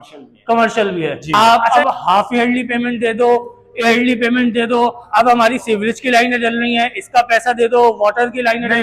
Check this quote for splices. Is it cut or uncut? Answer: cut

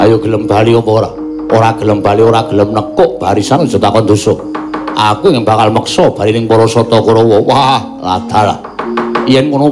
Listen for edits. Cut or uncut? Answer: uncut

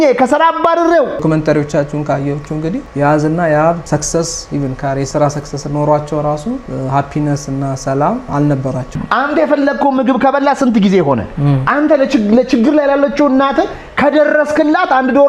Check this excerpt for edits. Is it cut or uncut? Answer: cut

